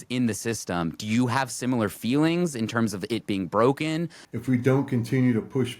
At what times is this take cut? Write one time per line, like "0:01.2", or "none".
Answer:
0:04.2